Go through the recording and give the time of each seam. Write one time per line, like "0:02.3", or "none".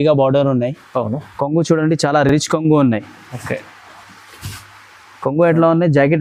none